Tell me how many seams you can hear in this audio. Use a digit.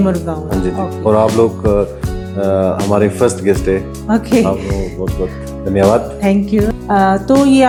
0